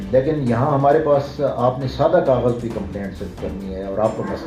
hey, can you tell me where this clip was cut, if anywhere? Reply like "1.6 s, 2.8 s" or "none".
none